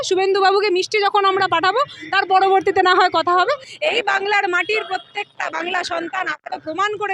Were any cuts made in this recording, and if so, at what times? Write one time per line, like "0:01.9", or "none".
0:03.7